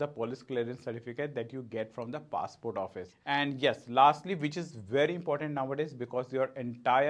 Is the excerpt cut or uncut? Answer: cut